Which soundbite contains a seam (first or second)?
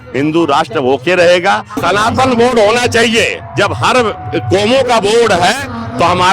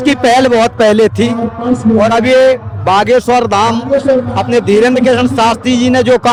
first